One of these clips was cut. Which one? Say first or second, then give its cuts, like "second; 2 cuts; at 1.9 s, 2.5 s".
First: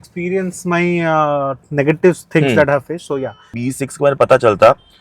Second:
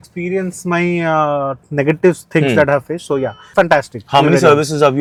first; 1 cut; at 3.4 s